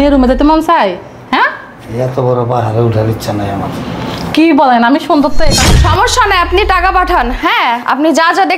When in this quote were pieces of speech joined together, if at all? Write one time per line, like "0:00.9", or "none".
0:05.5